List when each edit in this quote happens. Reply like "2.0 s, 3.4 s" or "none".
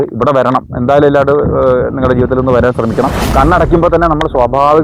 3.2 s